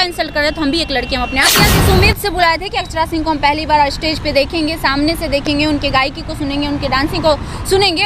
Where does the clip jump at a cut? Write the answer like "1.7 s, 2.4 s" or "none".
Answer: 1.5 s